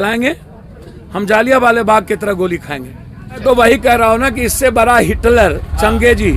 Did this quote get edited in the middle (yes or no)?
yes